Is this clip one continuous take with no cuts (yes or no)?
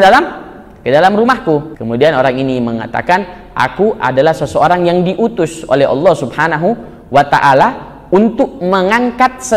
no